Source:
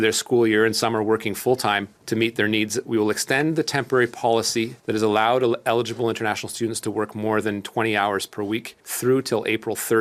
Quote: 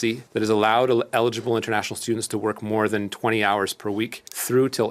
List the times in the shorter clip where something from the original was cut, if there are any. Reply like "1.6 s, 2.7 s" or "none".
none